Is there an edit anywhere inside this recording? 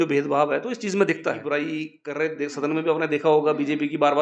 yes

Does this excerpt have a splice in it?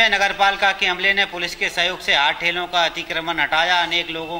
no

